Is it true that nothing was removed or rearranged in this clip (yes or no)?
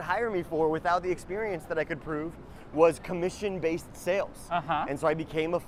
yes